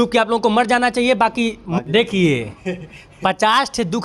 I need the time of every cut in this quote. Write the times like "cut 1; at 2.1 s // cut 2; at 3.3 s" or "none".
cut 1; at 1.6 s